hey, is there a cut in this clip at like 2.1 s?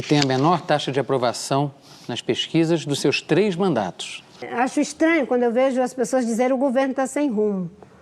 no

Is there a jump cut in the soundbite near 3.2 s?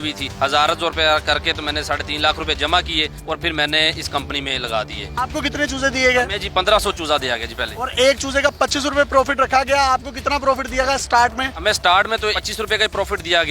no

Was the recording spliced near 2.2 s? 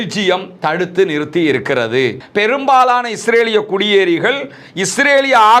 yes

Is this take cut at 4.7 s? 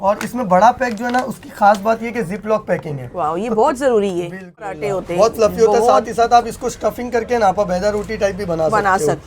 yes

